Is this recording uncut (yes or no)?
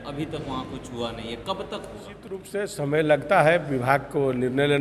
no